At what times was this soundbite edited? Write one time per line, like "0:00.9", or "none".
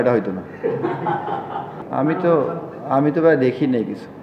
0:01.8